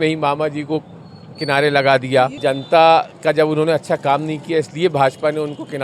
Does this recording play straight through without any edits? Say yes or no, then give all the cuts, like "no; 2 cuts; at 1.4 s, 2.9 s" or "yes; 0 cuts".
no; 1 cut; at 2.4 s